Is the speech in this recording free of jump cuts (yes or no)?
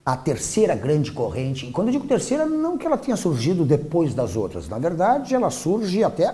yes